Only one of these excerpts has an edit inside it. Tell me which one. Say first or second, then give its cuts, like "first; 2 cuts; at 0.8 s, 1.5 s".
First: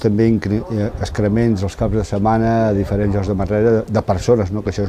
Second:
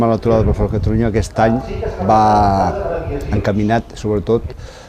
first; 1 cut; at 1.8 s